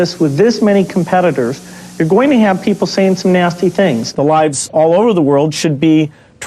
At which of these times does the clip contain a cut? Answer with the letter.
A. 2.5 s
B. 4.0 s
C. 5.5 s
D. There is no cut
B